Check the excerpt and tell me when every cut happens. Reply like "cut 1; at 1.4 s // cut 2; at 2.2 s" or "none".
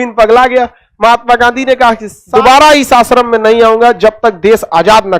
cut 1; at 2.1 s